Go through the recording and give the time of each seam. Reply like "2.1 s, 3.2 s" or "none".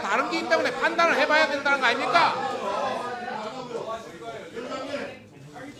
none